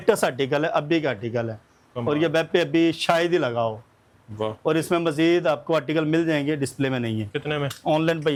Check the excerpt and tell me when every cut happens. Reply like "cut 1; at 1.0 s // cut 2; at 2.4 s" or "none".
none